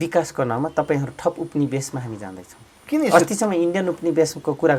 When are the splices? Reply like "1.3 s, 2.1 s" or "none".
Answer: none